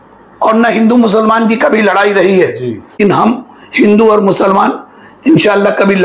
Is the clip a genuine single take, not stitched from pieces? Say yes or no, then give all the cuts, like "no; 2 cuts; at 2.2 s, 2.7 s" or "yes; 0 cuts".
no; 1 cut; at 3.0 s